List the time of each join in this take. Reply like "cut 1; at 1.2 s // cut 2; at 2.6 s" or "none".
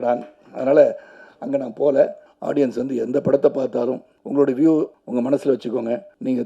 cut 1; at 2.3 s